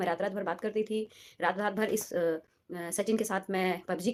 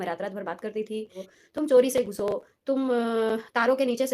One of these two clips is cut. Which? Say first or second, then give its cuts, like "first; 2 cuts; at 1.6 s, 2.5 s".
second; 1 cut; at 1.3 s